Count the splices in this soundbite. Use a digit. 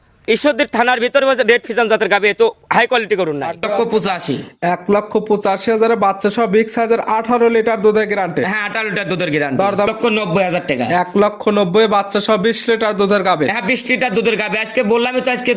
2